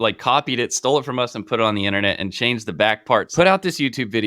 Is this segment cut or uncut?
cut